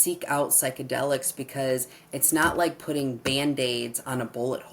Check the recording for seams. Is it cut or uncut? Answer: uncut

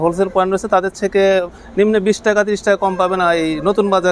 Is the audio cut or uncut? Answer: uncut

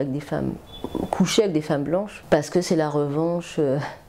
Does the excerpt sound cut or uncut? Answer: cut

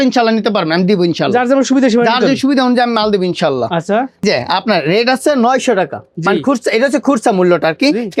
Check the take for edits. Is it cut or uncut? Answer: uncut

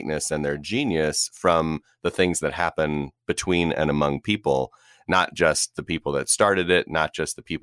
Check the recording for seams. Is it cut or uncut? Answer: uncut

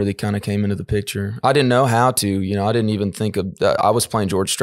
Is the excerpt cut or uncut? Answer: uncut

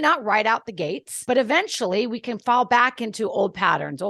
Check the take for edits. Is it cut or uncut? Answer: cut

